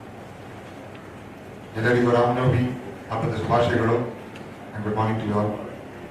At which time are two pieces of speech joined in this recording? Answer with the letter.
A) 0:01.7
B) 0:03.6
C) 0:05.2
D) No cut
C